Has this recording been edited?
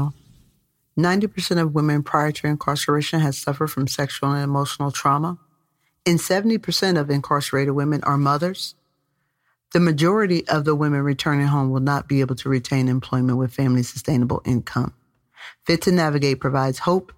no; 0 cuts

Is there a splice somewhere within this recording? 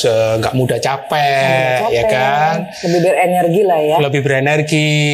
no; 0 cuts

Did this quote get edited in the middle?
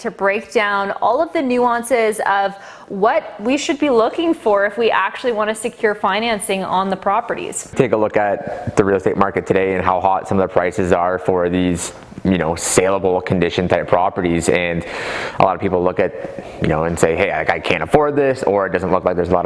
yes; 1 cut; at 7.7 s

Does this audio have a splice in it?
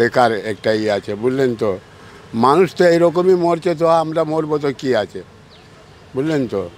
no; 0 cuts

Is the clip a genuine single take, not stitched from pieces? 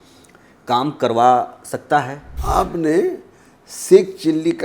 no; 1 cut; at 2.3 s

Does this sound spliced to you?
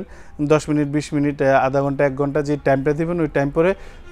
no; 0 cuts

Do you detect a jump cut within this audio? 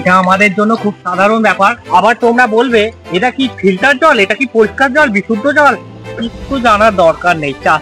yes; 1 cut; at 1.8 s

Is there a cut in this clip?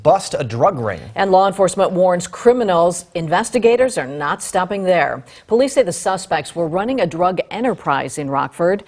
no; 0 cuts

